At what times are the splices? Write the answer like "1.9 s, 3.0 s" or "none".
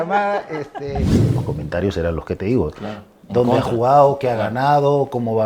1.3 s

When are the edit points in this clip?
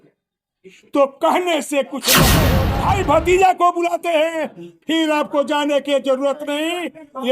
2.5 s

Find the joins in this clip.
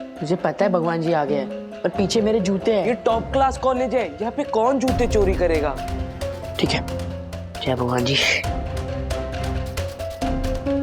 2.8 s

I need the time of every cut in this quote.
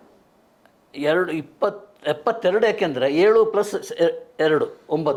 none

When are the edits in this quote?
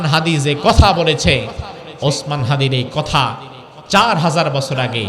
none

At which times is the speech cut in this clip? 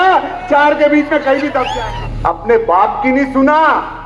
1.8 s

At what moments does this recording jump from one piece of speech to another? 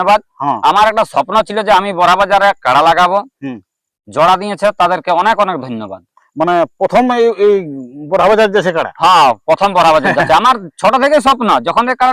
none

